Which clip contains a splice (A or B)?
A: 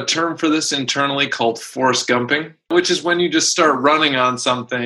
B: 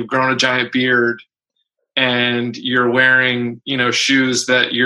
A